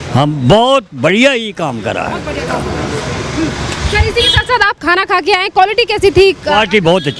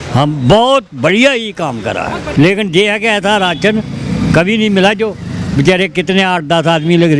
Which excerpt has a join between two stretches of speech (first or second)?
second